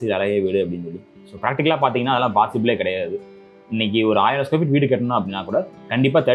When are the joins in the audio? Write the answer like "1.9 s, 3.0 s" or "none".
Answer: none